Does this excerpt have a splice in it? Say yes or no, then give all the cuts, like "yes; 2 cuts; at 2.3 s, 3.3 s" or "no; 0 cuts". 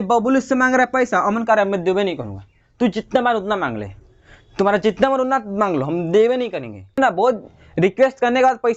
yes; 1 cut; at 7.0 s